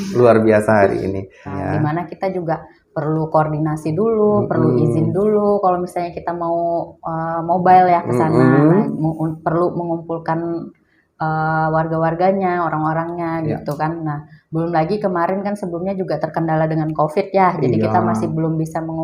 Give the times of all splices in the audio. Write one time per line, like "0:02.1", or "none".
0:01.6